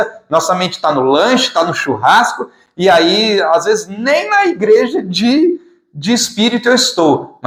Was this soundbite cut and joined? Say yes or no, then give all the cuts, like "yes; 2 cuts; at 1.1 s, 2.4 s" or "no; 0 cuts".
no; 0 cuts